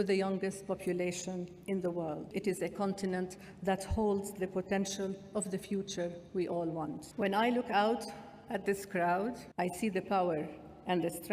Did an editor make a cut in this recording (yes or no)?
yes